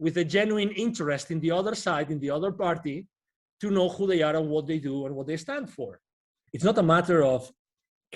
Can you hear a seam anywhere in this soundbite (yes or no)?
yes